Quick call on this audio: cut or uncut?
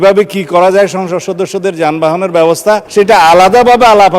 cut